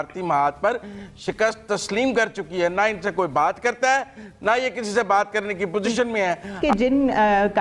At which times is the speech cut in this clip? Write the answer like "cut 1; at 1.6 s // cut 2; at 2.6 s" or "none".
cut 1; at 6.6 s